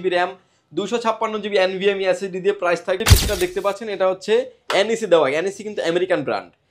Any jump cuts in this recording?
yes; 1 cut; at 3.0 s

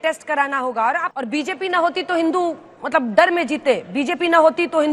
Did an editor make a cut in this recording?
yes; 1 cut; at 1.1 s

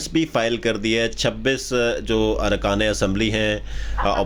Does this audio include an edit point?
no; 0 cuts

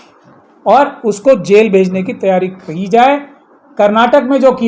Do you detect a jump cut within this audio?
no; 0 cuts

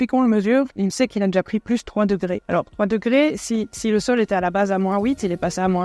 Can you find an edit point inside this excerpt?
yes; 1 cut; at 2.4 s

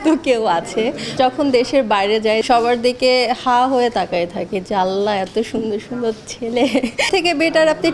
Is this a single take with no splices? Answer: no; 3 cuts; at 1.1 s, 2.4 s, 7.1 s

